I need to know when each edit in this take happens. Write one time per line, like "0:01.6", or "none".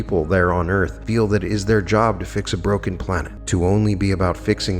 0:01.0
0:03.3